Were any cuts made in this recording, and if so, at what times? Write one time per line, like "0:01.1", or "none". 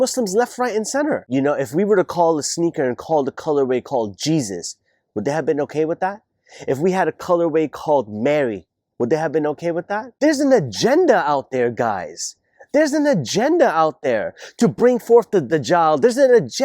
0:01.2
0:10.0